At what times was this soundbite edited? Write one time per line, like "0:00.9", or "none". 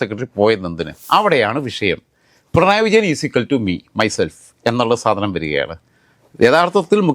0:00.9